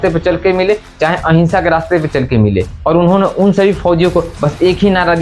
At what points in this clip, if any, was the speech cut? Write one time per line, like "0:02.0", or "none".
0:02.7